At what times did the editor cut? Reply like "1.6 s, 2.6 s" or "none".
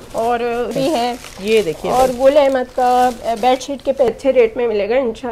0.7 s, 4.1 s